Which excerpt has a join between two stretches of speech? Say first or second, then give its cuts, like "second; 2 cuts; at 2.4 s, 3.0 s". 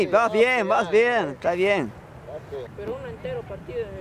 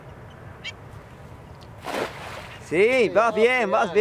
first; 1 cut; at 2.7 s